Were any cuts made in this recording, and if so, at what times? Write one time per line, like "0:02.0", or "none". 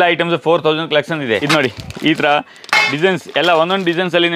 0:01.4